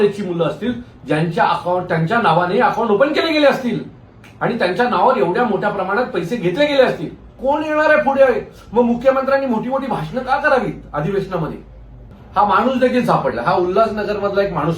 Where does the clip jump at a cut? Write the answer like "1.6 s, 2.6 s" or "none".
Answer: 7.3 s, 12.1 s